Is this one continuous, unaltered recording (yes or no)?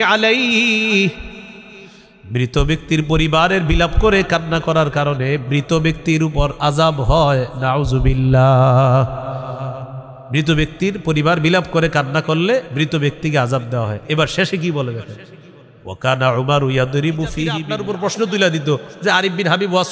no